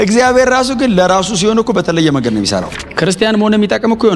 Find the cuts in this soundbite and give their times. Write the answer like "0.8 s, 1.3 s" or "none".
2.8 s